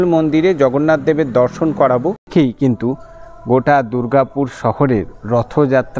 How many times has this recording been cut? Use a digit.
1